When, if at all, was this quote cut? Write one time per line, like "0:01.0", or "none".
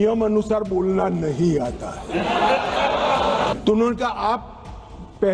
0:03.6

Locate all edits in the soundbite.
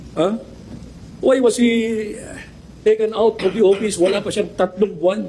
none

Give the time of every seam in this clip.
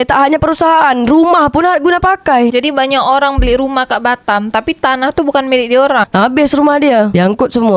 0:06.1

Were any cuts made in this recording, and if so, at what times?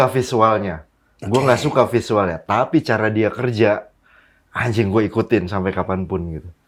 none

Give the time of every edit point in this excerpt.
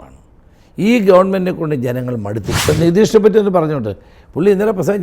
0:02.7

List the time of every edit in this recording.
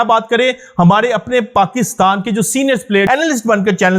0:03.1

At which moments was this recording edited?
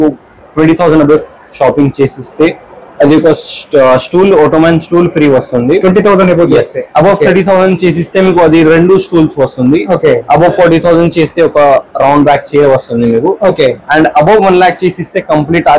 none

